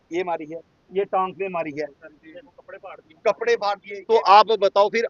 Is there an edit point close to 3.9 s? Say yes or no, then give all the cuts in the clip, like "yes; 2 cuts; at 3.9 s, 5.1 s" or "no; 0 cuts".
yes; 1 cut; at 3.9 s